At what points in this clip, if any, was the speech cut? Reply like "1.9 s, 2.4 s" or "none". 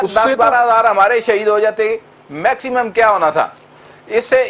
none